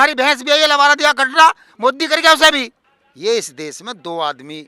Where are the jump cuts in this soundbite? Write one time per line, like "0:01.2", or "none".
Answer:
0:02.7